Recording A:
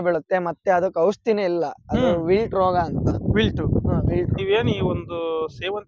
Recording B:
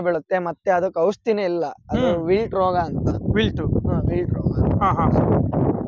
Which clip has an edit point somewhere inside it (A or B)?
A